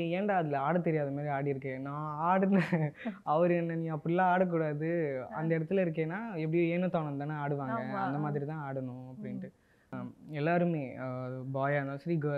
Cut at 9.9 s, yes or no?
yes